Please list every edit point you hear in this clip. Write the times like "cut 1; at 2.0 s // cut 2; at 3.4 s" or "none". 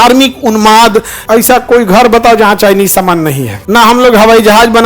cut 1; at 1.2 s // cut 2; at 3.5 s